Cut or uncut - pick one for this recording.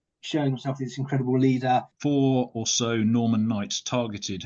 cut